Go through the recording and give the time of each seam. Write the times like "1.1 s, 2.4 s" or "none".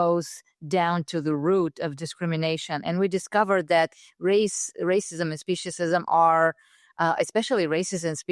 none